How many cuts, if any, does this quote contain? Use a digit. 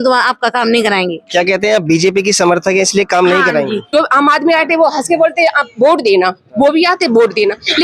1